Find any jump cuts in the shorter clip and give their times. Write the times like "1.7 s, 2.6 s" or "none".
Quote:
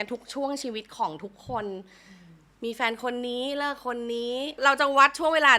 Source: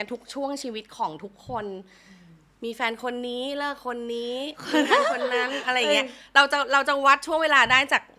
4.6 s